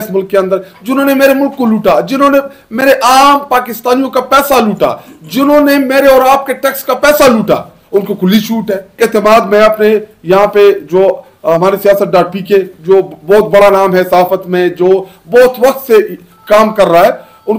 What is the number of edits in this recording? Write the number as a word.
one